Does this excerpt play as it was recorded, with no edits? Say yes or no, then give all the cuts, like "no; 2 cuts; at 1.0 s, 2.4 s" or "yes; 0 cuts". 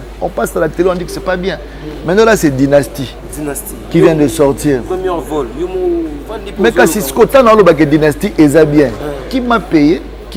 yes; 0 cuts